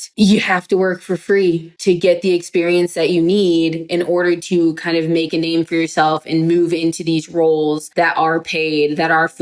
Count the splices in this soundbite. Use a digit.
1